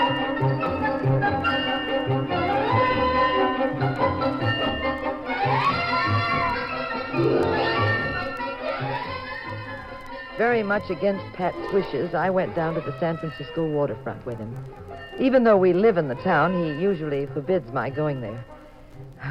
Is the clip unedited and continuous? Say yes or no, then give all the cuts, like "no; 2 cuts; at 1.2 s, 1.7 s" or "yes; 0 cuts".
yes; 0 cuts